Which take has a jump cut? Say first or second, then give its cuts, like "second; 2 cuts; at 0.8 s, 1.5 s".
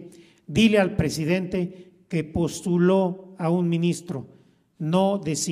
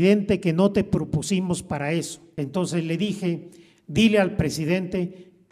second; 1 cut; at 2.2 s